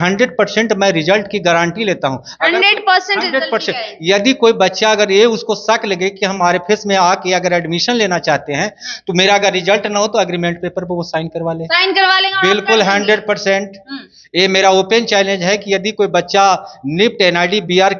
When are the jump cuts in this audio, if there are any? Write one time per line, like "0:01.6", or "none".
none